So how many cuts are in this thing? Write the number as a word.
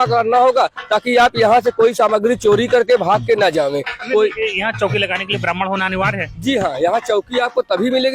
zero